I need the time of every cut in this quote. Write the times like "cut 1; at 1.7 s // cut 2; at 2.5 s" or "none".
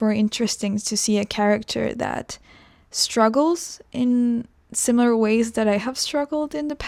none